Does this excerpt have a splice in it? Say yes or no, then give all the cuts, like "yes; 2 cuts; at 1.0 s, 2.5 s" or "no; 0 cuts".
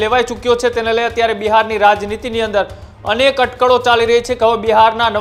no; 0 cuts